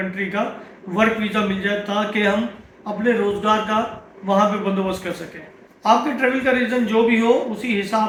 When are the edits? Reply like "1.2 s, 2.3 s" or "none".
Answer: none